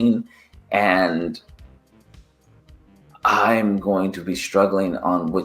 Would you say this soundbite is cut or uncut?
uncut